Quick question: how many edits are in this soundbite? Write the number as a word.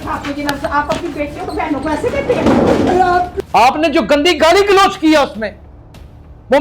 one